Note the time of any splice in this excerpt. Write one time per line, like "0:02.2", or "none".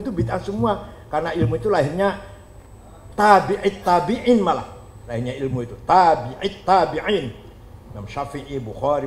none